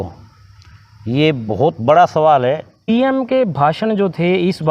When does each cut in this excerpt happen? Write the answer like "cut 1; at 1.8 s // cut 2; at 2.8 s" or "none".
cut 1; at 2.9 s